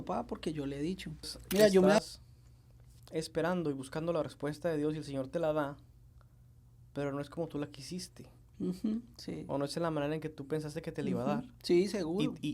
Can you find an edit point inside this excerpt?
yes; 1 cut; at 2.0 s

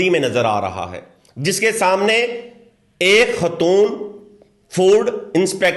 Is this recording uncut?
yes; 0 cuts

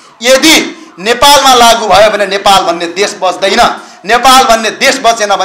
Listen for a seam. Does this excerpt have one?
no; 0 cuts

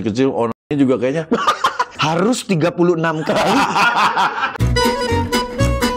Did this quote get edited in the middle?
yes; 2 cuts; at 1.9 s, 4.5 s

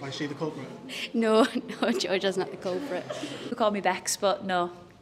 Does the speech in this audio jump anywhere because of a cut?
yes; 1 cut; at 3.5 s

